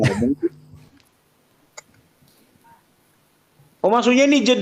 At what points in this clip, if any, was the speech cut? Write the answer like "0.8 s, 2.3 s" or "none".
none